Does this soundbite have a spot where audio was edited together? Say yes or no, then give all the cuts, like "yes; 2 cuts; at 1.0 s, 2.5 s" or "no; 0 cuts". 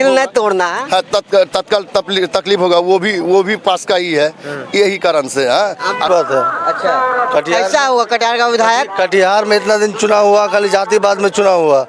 yes; 1 cut; at 6.1 s